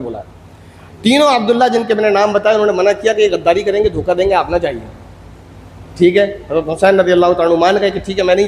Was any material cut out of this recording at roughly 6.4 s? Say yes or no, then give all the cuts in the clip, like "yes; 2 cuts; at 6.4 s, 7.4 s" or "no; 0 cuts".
no; 0 cuts